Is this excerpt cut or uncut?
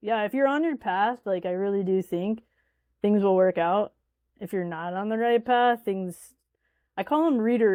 uncut